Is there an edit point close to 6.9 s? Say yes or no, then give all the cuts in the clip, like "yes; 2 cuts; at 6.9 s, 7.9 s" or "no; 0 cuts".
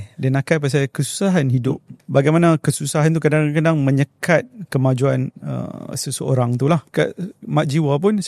yes; 2 cuts; at 1.9 s, 6.9 s